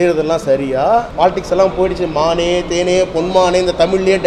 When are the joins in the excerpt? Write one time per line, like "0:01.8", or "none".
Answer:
0:01.1